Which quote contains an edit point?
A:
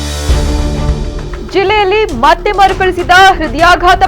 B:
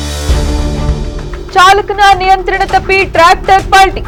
A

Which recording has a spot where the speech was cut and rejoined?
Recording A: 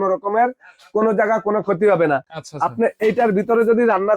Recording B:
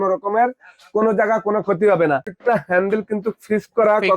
B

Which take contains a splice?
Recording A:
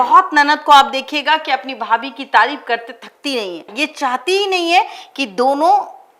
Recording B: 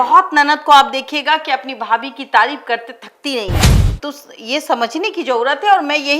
B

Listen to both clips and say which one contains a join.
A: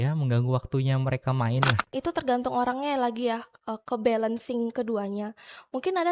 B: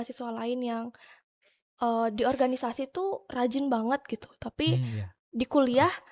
A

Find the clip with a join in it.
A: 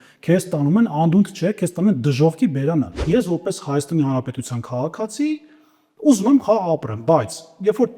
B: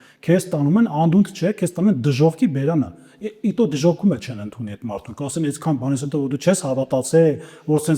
A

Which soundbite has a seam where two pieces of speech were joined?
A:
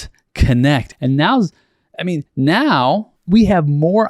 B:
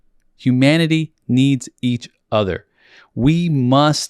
A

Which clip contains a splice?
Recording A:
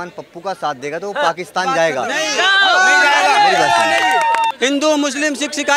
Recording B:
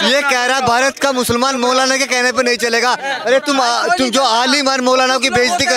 A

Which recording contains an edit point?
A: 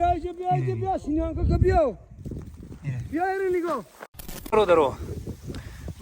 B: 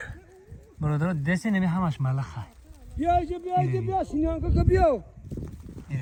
A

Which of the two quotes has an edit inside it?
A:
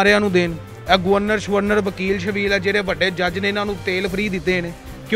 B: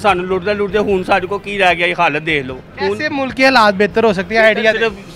B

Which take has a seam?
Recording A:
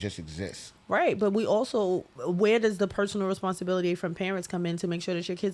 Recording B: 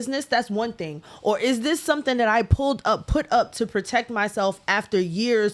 A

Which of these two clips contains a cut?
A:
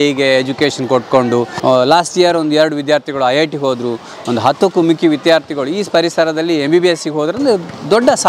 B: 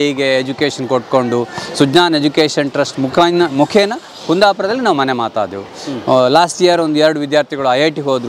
A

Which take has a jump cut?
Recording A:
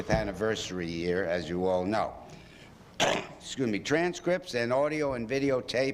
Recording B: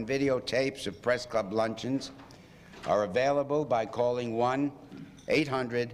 A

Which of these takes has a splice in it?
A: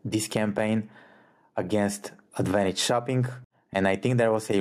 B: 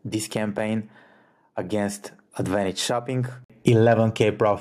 B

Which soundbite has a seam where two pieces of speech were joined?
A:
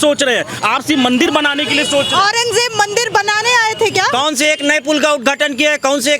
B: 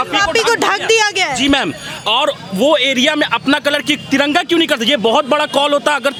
A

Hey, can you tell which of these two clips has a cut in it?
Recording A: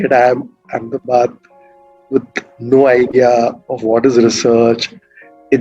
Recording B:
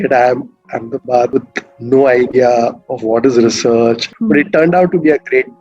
B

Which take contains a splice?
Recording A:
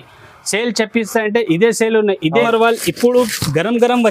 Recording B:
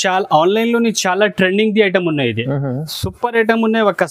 A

